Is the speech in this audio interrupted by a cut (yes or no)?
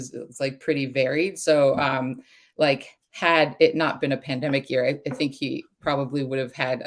no